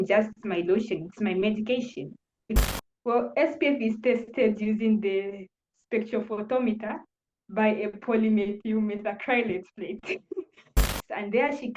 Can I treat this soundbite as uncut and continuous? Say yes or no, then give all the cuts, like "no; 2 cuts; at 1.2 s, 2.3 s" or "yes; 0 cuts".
no; 2 cuts; at 2.6 s, 10.8 s